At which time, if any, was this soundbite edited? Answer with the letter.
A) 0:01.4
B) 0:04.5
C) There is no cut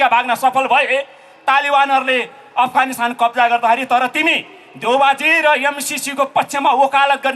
C